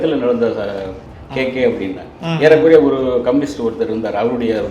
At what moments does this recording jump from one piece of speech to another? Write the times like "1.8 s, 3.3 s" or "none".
1.1 s